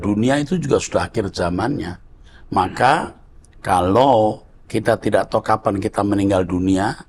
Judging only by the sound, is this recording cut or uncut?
uncut